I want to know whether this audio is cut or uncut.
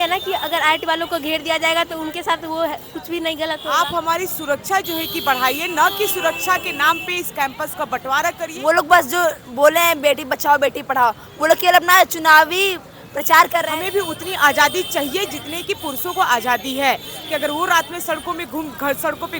cut